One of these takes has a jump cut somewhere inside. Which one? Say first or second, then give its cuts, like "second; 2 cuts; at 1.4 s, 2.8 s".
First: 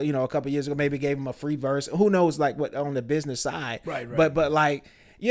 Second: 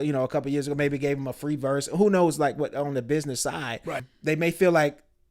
second; 1 cut; at 4.0 s